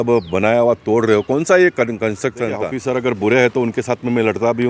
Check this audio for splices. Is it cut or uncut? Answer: cut